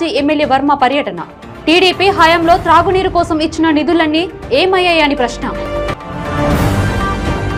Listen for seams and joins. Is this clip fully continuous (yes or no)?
yes